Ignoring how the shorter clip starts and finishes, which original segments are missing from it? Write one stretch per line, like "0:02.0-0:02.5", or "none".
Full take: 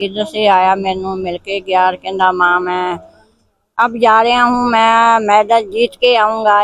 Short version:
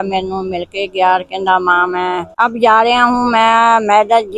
0:03.0-0:03.7